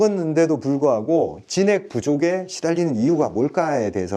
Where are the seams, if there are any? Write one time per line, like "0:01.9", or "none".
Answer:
none